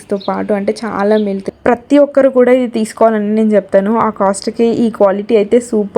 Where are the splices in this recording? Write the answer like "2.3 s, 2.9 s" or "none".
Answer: 1.5 s